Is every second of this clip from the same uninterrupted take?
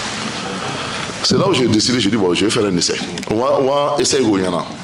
yes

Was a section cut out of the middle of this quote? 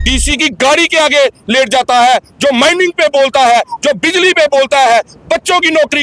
no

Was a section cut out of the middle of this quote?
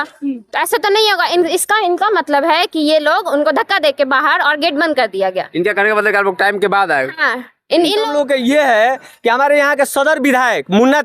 yes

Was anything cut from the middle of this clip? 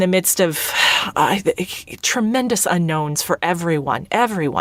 no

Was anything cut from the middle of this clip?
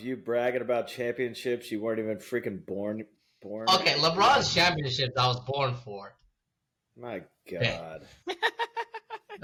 no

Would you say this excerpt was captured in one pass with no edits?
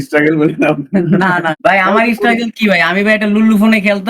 no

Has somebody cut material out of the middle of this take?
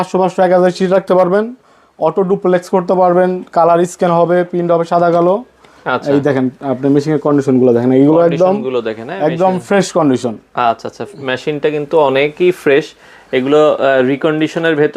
no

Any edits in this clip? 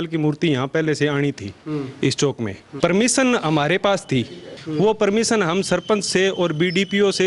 yes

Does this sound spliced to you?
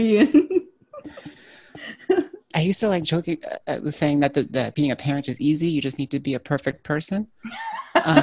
no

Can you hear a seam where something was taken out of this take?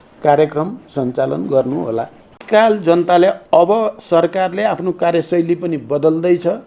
yes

